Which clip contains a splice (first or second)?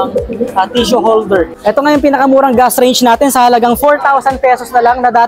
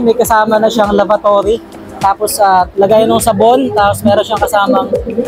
first